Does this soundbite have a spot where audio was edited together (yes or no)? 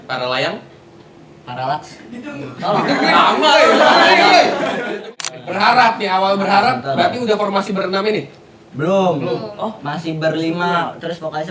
yes